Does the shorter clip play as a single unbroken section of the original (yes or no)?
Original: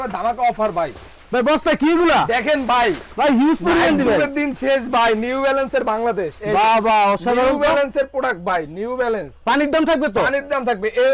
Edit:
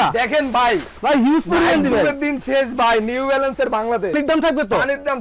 no